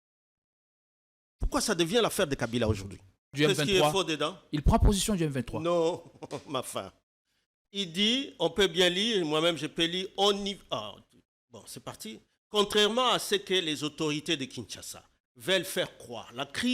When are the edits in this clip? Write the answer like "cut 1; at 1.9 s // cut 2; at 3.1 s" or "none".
cut 1; at 3.3 s